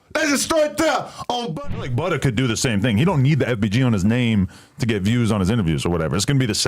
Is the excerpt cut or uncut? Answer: cut